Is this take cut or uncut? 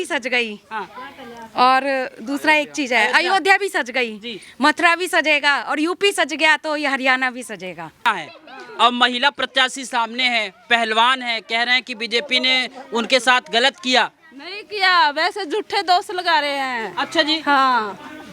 cut